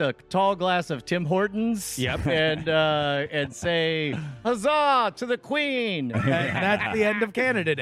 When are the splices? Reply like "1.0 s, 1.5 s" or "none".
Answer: 6.1 s